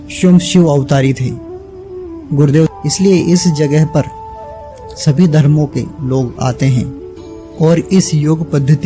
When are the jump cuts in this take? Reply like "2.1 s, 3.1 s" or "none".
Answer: 2.7 s